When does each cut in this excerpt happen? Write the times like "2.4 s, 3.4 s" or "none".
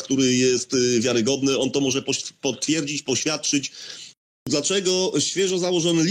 4.4 s